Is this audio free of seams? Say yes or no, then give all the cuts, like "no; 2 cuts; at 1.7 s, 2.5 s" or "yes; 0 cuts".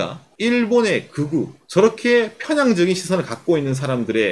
yes; 0 cuts